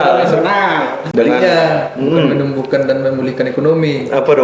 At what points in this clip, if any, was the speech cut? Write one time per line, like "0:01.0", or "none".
0:01.0